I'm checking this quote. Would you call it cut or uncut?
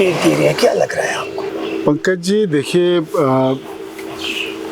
uncut